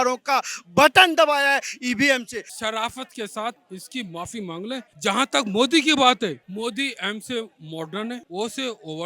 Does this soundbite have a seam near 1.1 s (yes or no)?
no